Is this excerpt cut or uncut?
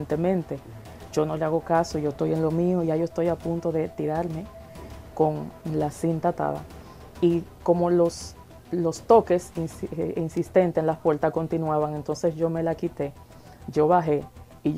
uncut